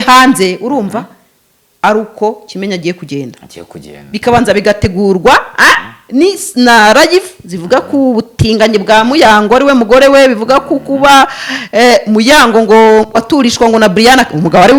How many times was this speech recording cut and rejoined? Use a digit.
0